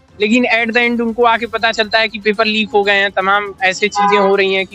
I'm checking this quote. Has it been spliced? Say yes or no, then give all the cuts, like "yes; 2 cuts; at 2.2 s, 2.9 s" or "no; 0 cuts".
no; 0 cuts